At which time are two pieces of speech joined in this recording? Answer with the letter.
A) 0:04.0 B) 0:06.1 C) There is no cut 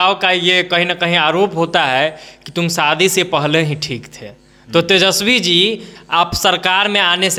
C